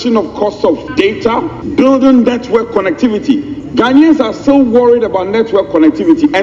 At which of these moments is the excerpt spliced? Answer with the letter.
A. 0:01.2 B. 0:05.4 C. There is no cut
A